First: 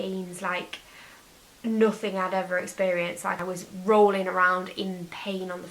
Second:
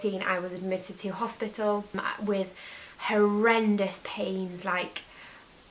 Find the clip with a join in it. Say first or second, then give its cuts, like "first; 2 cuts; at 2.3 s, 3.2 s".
first; 1 cut; at 3.4 s